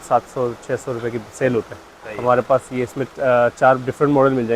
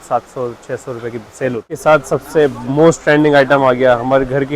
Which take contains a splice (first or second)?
second